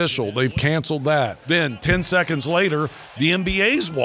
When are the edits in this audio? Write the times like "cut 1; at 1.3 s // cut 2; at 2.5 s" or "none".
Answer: cut 1; at 1.4 s